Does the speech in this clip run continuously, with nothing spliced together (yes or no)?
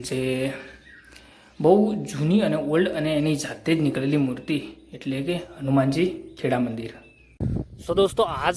no